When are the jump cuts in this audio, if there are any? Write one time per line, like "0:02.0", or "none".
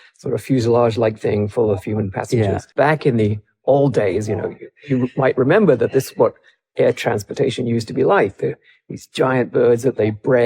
0:02.7